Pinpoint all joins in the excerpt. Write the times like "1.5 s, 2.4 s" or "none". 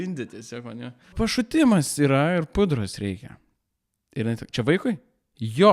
1.1 s

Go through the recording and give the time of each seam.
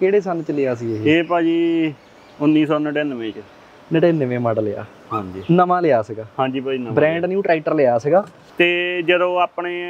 8.4 s

